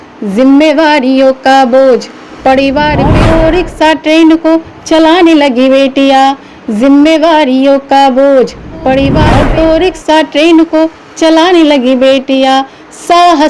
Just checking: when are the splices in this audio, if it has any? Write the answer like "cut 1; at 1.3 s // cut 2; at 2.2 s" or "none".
cut 1; at 3.1 s // cut 2; at 9.2 s